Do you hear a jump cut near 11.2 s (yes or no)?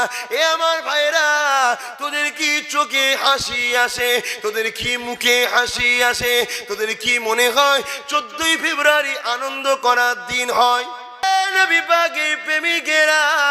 yes